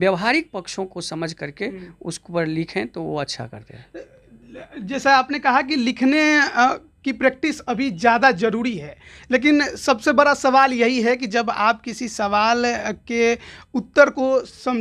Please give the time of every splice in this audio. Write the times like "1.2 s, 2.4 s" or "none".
none